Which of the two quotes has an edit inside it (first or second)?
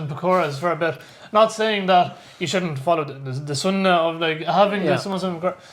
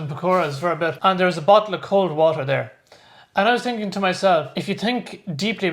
second